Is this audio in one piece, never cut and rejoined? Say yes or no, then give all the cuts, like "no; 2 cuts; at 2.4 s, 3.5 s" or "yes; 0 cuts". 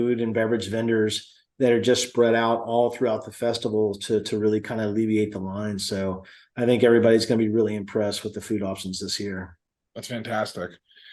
yes; 0 cuts